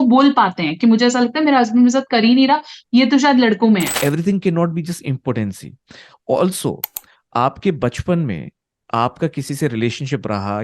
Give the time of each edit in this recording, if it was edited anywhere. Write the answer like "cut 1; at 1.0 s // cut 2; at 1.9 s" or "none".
cut 1; at 3.9 s